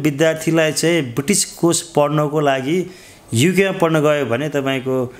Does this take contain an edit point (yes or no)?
no